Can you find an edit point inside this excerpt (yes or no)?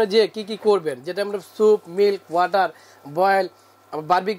no